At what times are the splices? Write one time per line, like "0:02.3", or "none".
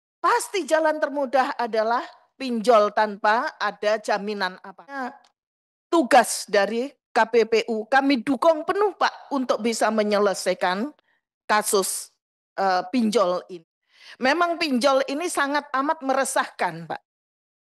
0:05.1
0:13.4